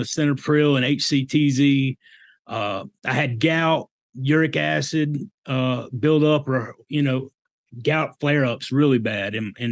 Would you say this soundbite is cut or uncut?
uncut